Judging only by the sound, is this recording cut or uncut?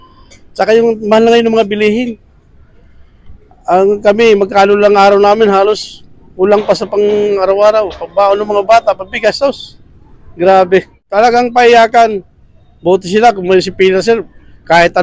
cut